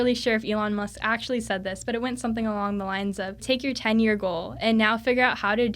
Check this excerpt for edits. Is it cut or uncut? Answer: cut